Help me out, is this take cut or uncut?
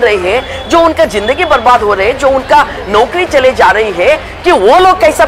uncut